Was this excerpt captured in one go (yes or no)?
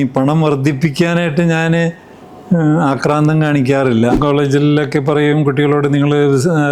no